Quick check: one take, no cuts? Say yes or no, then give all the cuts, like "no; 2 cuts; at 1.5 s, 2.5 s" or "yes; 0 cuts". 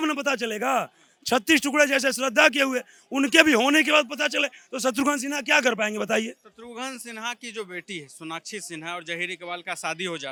yes; 0 cuts